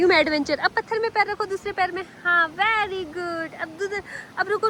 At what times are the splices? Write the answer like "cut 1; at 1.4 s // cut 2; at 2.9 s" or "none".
none